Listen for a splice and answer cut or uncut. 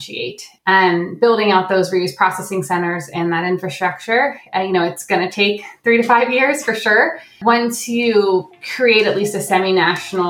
cut